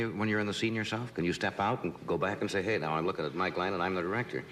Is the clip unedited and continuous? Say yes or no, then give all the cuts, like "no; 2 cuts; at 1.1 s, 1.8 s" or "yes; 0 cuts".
yes; 0 cuts